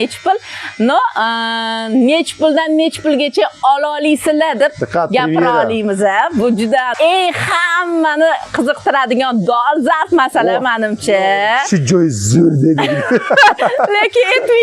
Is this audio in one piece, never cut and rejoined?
no; 1 cut; at 6.9 s

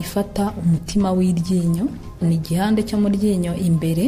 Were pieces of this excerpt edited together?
yes; 1 cut; at 2.2 s

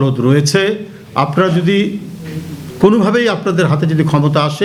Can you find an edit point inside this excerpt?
no; 0 cuts

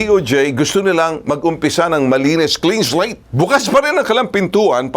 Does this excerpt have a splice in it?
yes; 1 cut; at 3.2 s

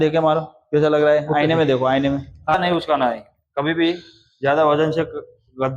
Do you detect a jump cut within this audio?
yes; 1 cut; at 2.5 s

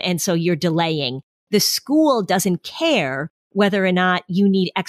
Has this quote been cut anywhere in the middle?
no; 0 cuts

